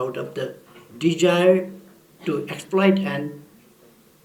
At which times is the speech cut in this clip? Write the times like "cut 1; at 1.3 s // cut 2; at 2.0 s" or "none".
none